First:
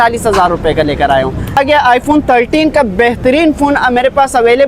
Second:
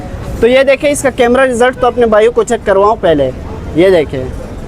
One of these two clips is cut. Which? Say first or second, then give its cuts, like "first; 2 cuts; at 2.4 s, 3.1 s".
first; 1 cut; at 1.6 s